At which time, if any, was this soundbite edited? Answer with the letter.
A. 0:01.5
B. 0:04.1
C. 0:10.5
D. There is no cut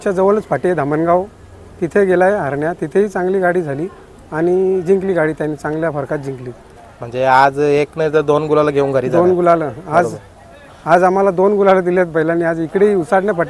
D